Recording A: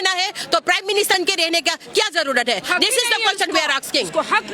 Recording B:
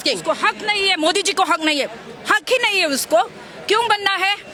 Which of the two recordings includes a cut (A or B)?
A